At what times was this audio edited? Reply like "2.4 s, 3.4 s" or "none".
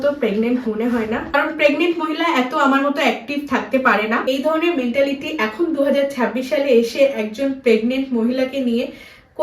1.4 s, 4.2 s